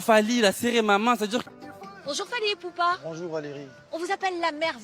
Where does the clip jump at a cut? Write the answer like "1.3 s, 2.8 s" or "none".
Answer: 1.4 s